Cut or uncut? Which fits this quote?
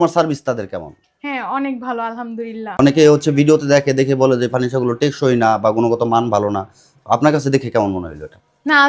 cut